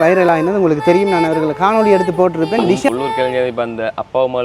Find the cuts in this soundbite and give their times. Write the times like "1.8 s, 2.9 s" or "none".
2.9 s